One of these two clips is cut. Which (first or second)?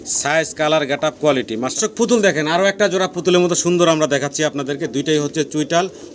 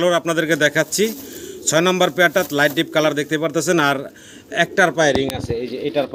first